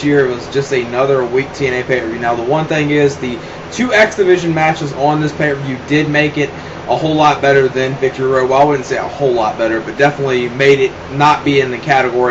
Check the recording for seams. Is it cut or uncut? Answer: cut